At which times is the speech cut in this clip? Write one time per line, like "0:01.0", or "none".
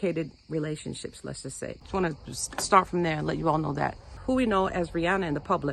0:01.8
0:04.1